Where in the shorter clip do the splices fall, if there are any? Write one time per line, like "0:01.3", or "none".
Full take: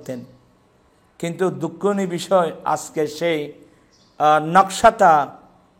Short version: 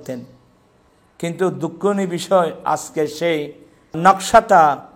0:04.0